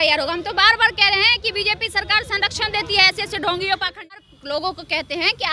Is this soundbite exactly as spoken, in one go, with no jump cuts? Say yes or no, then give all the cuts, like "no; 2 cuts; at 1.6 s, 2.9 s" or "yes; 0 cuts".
no; 1 cut; at 4.2 s